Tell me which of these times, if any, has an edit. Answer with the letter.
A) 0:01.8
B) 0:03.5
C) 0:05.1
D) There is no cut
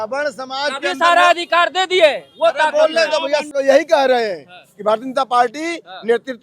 B